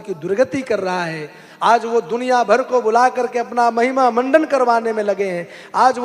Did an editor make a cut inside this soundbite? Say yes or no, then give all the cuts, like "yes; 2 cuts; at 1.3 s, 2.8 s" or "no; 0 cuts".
no; 0 cuts